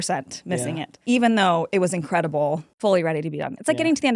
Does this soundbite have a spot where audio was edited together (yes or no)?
yes